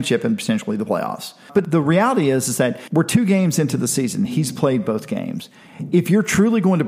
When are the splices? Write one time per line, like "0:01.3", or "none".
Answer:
0:01.6
0:02.8